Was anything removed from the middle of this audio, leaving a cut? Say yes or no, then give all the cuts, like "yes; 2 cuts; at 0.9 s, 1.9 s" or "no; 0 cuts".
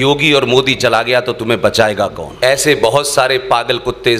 yes; 1 cut; at 2.2 s